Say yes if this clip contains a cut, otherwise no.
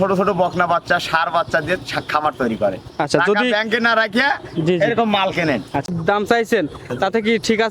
yes